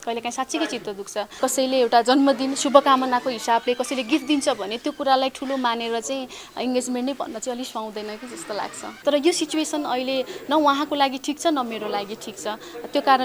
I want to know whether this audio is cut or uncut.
cut